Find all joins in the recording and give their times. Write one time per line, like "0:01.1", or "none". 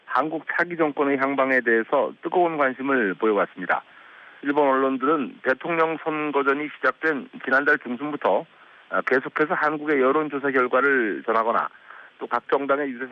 none